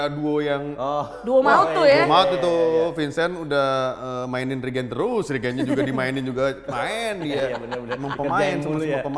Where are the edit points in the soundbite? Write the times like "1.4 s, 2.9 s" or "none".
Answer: none